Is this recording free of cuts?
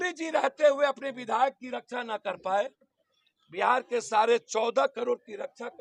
yes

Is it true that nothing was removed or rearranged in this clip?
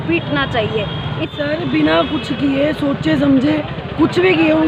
no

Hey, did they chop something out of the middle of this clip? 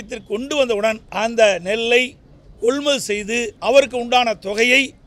yes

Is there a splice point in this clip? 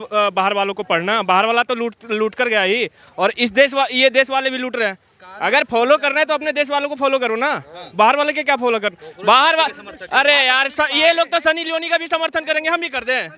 no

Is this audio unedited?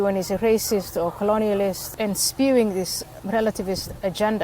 no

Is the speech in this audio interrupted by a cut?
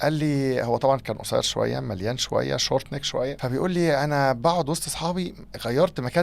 yes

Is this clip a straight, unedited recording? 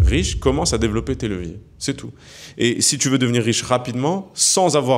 yes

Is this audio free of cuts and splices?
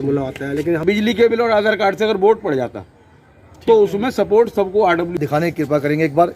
no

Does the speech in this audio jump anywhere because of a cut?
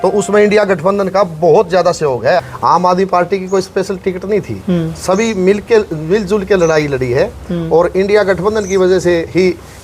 yes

